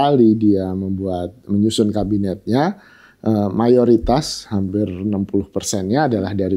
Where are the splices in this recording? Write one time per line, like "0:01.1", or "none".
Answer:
none